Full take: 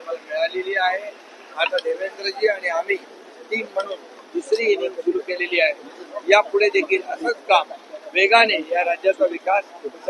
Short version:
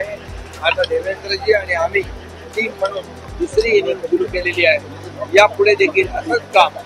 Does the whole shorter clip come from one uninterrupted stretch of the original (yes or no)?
yes